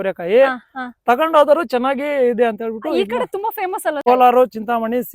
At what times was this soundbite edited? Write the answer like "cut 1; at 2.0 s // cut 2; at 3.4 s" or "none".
cut 1; at 4.0 s